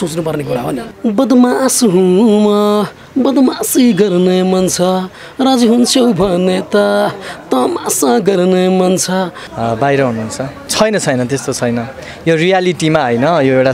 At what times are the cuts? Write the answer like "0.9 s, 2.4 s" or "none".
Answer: 0.9 s, 9.4 s, 10.6 s